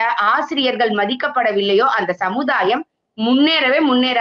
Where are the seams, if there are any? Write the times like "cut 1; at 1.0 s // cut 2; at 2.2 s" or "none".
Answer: none